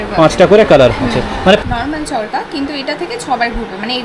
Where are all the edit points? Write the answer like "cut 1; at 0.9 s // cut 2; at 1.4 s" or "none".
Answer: cut 1; at 1.6 s